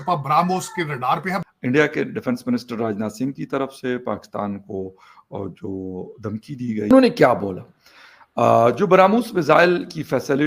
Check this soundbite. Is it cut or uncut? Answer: cut